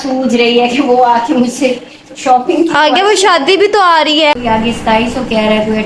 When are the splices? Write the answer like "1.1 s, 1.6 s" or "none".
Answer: 4.4 s

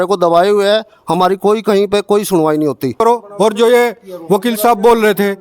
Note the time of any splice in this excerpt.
3.0 s

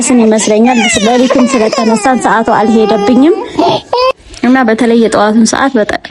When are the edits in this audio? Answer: none

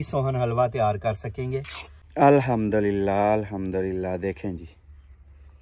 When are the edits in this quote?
1.8 s

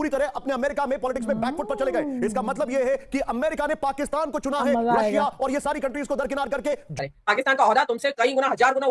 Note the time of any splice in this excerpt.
6.9 s

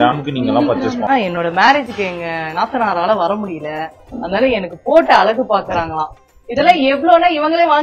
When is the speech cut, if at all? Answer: 1.1 s

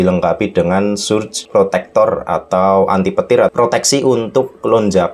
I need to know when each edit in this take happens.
1.4 s, 3.5 s

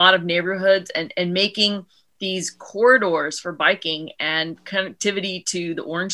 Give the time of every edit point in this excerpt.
none

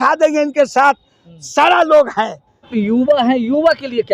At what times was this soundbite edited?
2.7 s

